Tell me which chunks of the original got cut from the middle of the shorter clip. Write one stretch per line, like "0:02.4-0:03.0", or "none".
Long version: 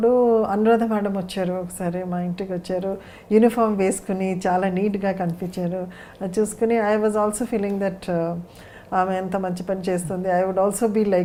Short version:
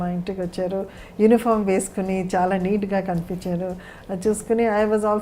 none